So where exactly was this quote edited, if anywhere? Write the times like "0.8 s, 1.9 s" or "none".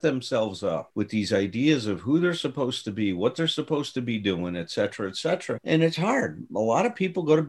none